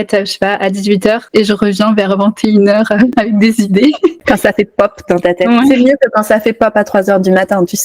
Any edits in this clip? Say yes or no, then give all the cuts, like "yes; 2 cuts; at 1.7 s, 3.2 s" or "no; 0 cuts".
yes; 1 cut; at 4.2 s